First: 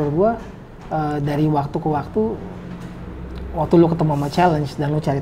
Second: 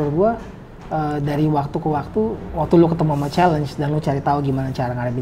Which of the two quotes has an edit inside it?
second; 1 cut; at 2.4 s

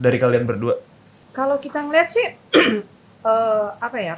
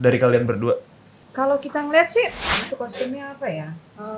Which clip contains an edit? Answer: second; 1 cut; at 2.4 s

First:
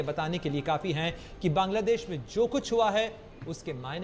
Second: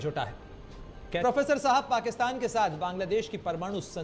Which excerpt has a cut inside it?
second; 1 cut; at 1.0 s

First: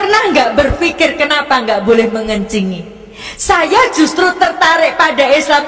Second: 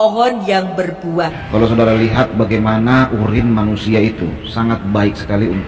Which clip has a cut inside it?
second; 1 cut; at 1.4 s

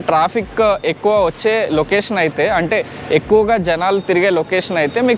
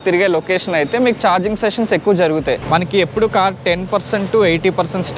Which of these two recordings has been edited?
second; 1 cut; at 2.6 s

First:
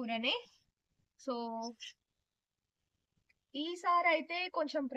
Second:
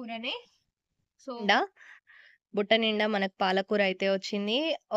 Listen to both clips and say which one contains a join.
second; 1 cut; at 1.4 s

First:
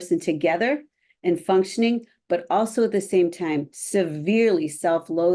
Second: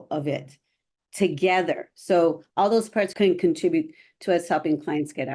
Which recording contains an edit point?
second; 1 cut; at 3.1 s

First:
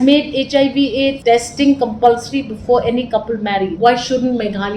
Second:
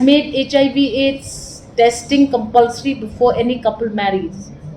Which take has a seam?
first; 2 cuts; at 1.2 s, 3.7 s

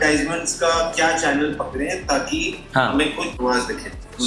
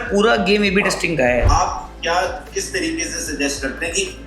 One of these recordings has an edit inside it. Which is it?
second; 1 cut; at 1.5 s

